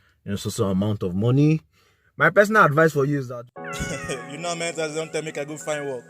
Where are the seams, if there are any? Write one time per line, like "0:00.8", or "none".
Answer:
0:03.2